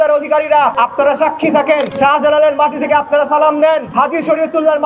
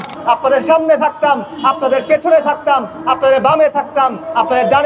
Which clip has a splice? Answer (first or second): first